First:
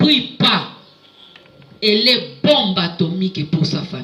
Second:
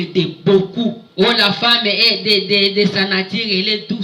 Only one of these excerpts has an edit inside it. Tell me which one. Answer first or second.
second